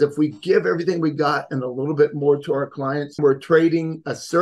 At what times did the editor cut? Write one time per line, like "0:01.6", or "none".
0:03.1